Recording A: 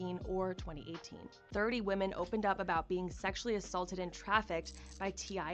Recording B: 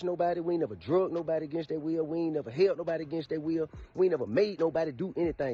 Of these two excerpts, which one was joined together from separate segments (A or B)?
A